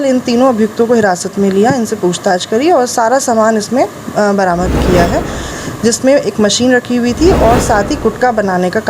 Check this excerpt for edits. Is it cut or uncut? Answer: cut